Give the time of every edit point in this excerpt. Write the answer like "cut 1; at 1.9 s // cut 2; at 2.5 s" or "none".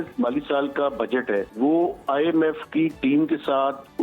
cut 1; at 1.5 s

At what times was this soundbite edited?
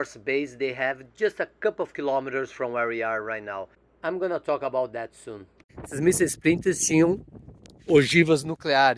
none

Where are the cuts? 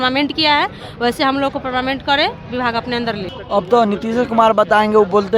cut 1; at 3.4 s

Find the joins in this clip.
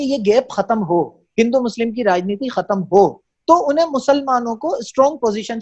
none

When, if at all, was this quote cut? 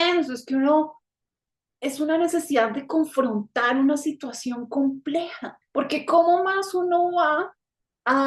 cut 1; at 5.6 s

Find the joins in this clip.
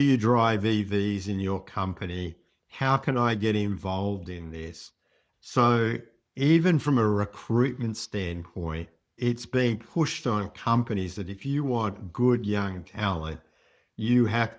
none

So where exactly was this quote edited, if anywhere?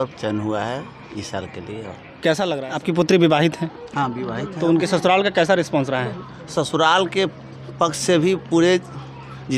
cut 1; at 2.6 s

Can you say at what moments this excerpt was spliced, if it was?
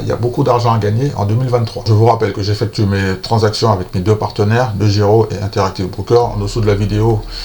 cut 1; at 1.8 s

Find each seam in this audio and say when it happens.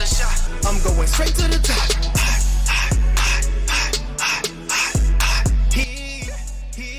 none

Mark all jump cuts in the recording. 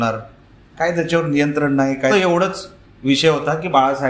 cut 1; at 2.1 s

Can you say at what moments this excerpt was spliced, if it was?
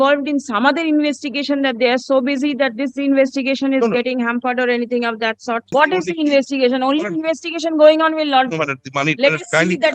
cut 1; at 5.7 s

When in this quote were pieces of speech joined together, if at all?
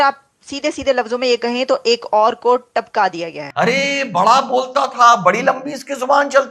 cut 1; at 3.4 s

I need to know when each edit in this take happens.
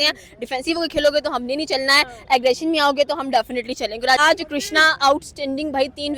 cut 1; at 4.2 s

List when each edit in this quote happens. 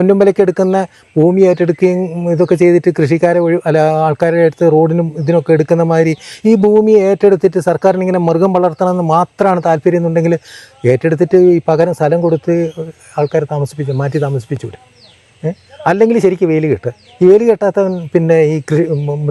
none

